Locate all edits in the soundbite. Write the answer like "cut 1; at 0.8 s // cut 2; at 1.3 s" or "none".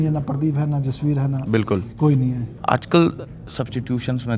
cut 1; at 2.5 s